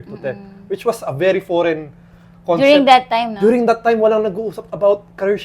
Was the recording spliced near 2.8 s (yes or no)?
no